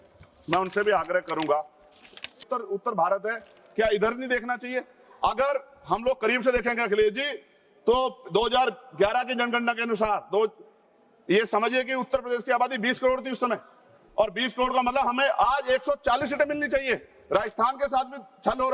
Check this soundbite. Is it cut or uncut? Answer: cut